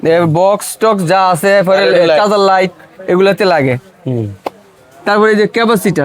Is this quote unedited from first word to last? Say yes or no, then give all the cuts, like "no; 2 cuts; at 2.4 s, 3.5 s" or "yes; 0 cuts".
yes; 0 cuts